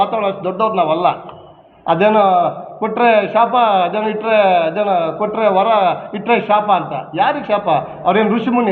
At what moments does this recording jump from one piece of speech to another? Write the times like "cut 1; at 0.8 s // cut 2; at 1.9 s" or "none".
none

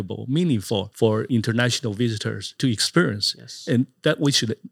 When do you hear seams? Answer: cut 1; at 1.2 s // cut 2; at 2.5 s

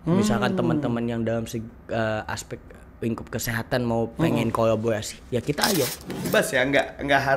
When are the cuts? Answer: cut 1; at 6.3 s

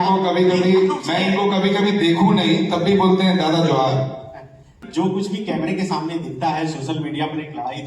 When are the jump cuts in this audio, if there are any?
cut 1; at 4.7 s

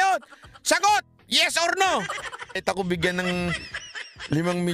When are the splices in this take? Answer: cut 1; at 2.6 s

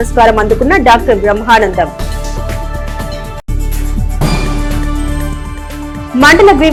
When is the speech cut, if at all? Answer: none

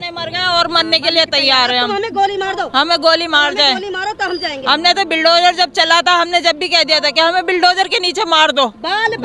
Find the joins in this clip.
none

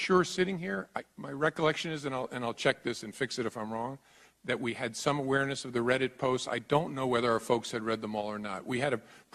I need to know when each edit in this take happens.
cut 1; at 4.6 s

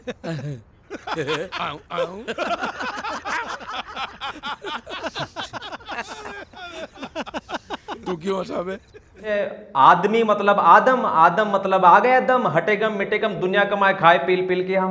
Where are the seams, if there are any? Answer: cut 1; at 9.2 s

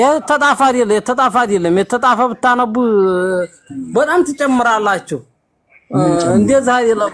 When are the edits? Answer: none

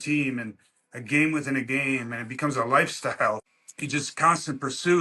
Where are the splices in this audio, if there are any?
none

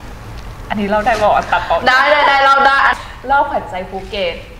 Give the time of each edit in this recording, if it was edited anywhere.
cut 1; at 2.9 s

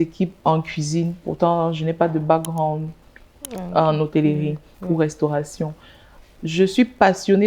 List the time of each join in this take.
none

